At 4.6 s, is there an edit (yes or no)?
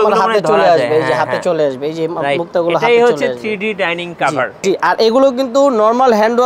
yes